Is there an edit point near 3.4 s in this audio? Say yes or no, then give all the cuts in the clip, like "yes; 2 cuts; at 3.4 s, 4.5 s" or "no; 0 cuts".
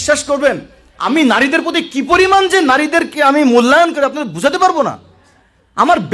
no; 1 cut; at 1.0 s